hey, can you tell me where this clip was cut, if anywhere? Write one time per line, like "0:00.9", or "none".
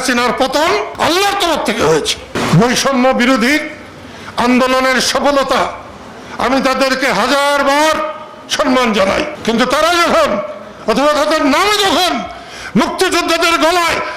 0:00.9
0:02.4